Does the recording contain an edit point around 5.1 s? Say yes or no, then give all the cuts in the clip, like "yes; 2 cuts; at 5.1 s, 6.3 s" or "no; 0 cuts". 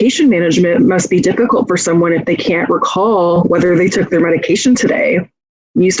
no; 1 cut; at 3.4 s